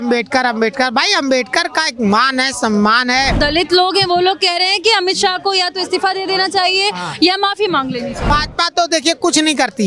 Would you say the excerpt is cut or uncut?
cut